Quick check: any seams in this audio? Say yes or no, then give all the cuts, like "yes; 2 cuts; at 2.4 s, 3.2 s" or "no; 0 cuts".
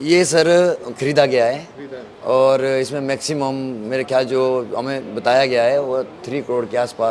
no; 0 cuts